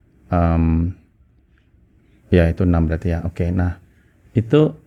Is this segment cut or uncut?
uncut